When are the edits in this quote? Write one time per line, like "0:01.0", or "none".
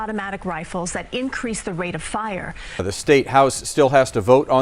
0:02.6